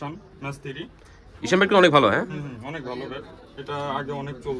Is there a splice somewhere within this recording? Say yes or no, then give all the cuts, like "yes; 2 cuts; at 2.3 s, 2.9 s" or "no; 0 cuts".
no; 0 cuts